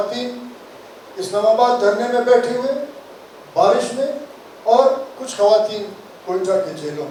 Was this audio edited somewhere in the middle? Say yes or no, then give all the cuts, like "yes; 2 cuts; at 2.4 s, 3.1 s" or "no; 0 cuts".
no; 0 cuts